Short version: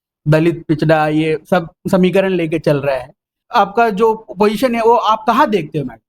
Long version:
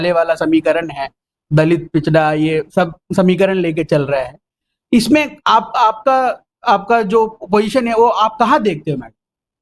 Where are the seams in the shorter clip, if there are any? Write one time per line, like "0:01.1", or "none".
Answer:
0:03.4